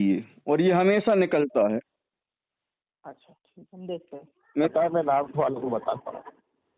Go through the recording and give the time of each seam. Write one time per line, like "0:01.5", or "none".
0:04.7

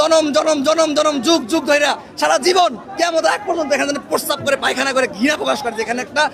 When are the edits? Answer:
none

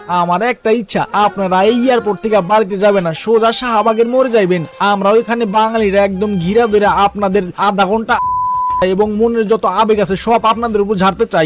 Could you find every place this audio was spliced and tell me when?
none

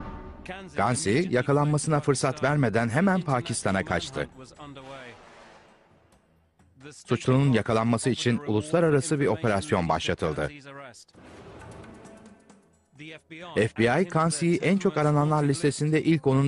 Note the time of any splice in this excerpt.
none

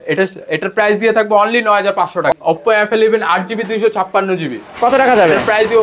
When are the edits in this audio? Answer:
0:02.3

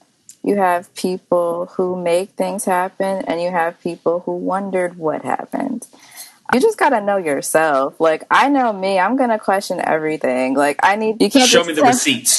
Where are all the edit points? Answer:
0:06.5
0:11.1

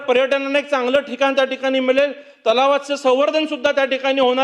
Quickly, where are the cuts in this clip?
none

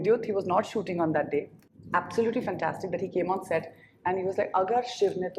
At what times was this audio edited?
none

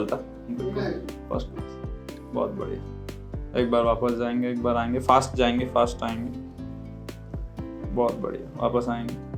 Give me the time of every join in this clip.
0:06.3
0:07.9

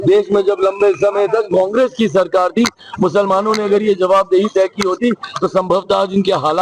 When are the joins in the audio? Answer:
none

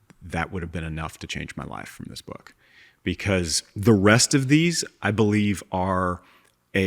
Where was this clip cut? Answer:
none

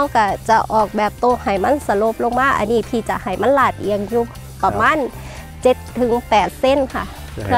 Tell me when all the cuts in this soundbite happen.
none

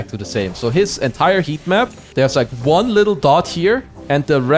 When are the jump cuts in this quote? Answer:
0:02.0

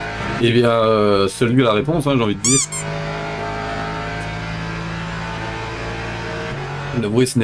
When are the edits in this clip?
0:03.4

